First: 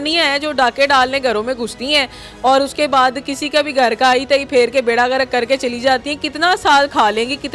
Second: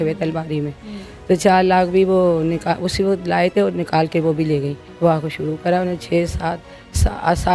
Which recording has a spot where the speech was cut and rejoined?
second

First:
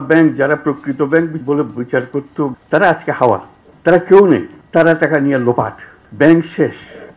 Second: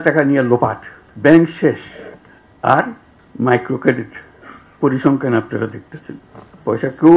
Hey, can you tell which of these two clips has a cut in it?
first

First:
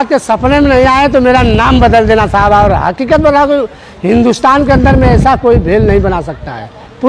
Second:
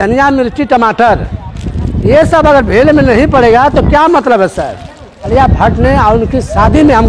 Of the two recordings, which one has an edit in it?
second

